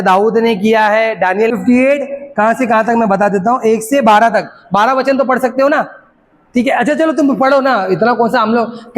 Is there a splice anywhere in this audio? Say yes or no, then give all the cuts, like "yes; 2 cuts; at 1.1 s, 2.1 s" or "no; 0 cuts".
yes; 1 cut; at 1.5 s